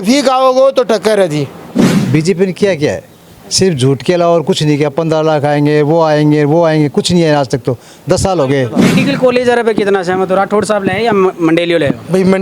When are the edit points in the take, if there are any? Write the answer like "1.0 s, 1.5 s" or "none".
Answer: 1.7 s, 8.8 s